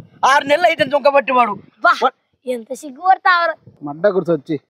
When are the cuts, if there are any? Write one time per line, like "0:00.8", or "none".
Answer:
0:03.7